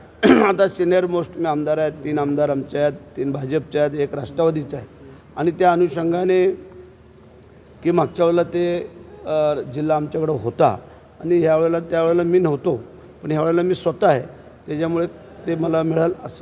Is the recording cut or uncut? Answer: uncut